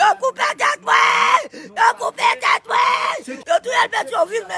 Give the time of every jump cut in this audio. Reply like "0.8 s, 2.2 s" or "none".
3.3 s